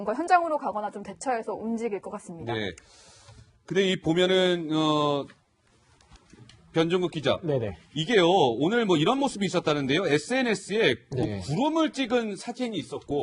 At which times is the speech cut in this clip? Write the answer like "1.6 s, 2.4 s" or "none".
7.3 s